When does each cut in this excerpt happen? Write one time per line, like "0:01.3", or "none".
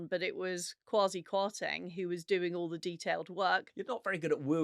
0:03.7